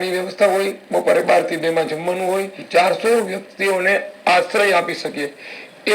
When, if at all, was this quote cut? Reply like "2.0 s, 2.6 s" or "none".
2.6 s